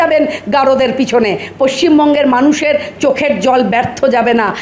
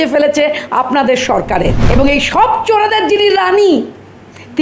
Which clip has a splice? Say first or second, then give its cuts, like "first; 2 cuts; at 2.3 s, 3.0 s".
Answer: second; 1 cut; at 1.8 s